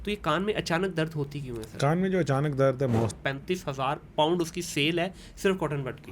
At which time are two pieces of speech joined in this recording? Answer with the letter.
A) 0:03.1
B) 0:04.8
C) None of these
A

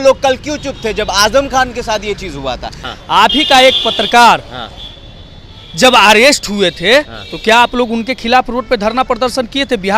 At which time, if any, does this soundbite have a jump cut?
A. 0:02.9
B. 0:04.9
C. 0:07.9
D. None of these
A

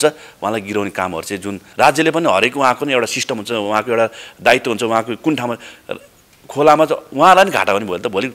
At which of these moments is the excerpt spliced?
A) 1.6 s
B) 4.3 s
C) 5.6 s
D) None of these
A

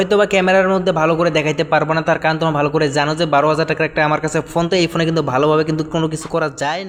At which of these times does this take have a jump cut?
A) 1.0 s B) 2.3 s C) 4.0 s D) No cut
D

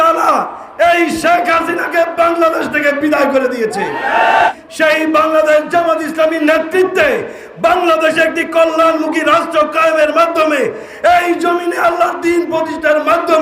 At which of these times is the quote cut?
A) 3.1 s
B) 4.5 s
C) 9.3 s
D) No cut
B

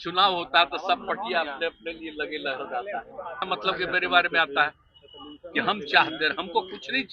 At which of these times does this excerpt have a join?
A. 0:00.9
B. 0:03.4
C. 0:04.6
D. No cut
B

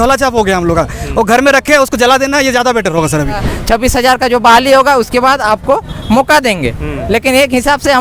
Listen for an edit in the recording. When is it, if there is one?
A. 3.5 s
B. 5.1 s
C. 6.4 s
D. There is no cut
A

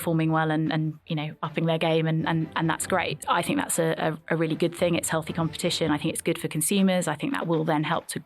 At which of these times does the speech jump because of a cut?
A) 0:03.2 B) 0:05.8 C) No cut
A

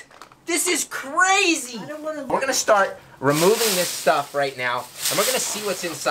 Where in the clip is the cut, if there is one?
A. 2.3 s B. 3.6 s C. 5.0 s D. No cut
A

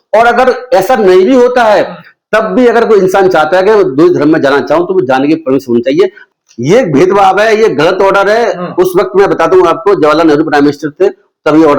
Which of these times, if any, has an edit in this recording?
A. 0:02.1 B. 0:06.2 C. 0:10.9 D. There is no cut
B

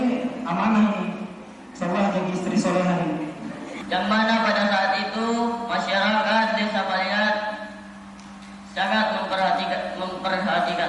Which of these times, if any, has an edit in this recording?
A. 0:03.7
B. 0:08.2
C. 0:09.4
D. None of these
A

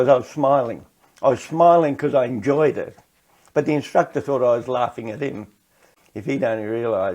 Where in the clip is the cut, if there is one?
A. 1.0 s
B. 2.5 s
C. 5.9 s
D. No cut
C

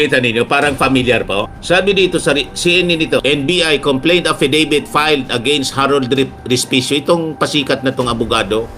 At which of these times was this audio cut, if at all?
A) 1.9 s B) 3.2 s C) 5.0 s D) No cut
B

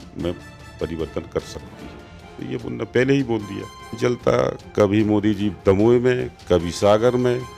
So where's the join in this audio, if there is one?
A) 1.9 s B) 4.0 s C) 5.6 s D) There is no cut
B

